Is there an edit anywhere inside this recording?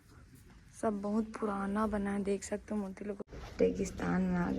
yes; 1 cut; at 3.3 s

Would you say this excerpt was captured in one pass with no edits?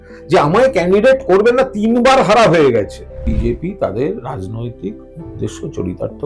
no; 1 cut; at 3.2 s

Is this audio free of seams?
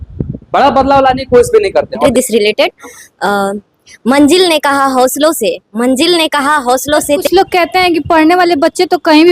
no; 2 cuts; at 2.0 s, 7.2 s

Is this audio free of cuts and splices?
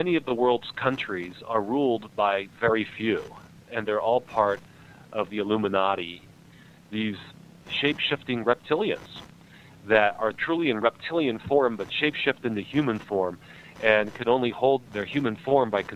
no; 6 cuts; at 3.6 s, 5.3 s, 6.4 s, 7.6 s, 10.4 s, 14.8 s

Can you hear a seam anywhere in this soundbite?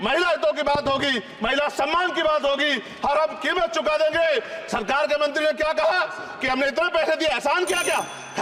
no; 0 cuts

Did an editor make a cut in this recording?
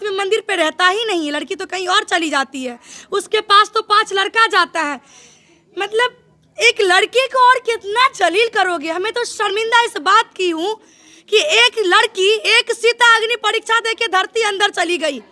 no; 0 cuts

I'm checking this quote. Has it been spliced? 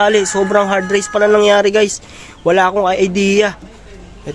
no; 0 cuts

